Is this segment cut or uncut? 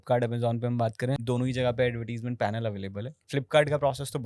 cut